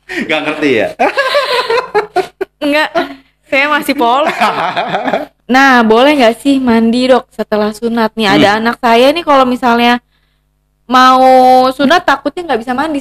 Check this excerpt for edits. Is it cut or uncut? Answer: cut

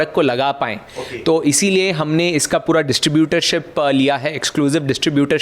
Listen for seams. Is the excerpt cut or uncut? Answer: uncut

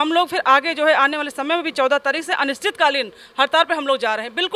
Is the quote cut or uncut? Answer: uncut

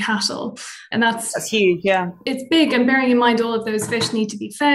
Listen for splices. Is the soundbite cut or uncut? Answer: cut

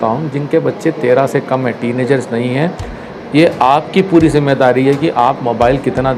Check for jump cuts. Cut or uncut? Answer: uncut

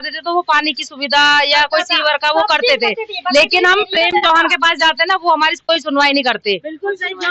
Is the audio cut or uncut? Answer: uncut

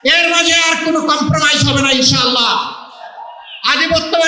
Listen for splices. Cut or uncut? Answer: uncut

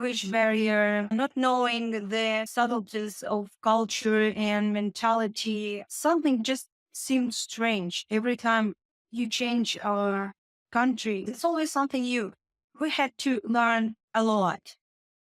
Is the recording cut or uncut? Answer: cut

